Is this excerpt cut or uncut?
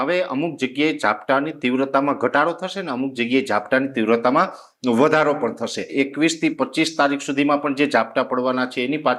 cut